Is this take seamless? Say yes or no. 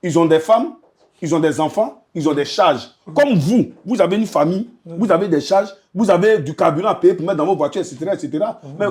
yes